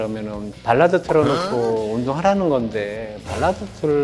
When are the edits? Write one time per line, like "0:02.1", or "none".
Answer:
none